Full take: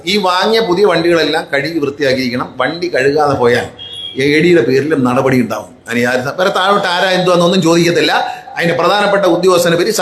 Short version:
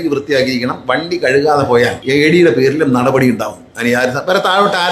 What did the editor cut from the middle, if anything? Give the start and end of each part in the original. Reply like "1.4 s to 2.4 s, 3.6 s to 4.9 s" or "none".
3.7 s to 4.1 s